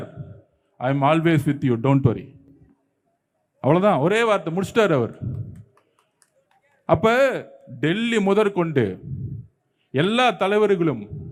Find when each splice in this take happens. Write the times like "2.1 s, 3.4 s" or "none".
none

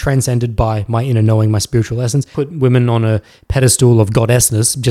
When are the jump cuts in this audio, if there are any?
2.3 s

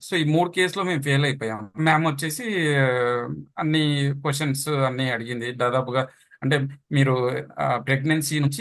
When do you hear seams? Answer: 1.7 s

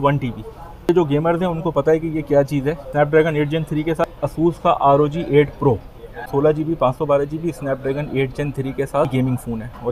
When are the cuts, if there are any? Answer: 0.9 s, 2.9 s, 4.1 s, 6.2 s, 9.1 s

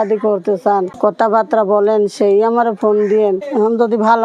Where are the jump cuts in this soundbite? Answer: 0.9 s, 3.4 s

